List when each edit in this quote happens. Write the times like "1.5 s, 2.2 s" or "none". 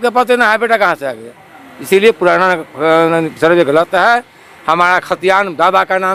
none